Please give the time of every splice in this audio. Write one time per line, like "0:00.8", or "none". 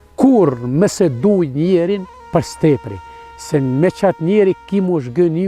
0:02.1